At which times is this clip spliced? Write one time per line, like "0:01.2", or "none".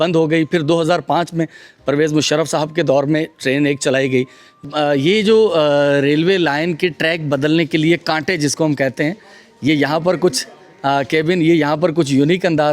0:04.6

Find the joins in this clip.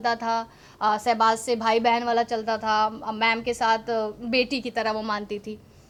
none

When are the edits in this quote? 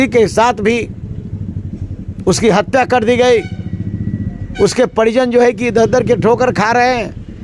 none

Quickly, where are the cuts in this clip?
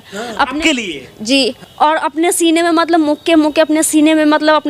0:01.6

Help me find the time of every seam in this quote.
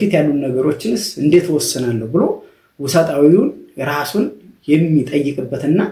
none

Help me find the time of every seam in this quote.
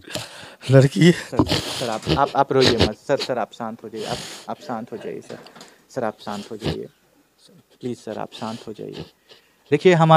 none

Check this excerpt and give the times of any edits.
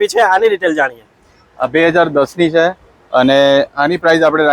none

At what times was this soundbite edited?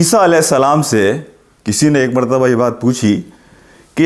none

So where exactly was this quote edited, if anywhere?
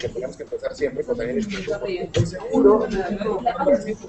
0:01.6

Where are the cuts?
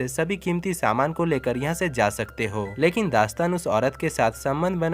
0:02.7

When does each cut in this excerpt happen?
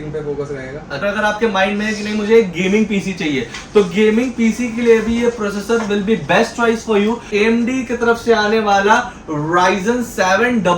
0:01.0
0:07.2

